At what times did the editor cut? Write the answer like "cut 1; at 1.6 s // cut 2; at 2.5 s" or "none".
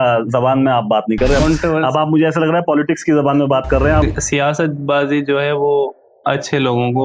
cut 1; at 1.4 s // cut 2; at 4.0 s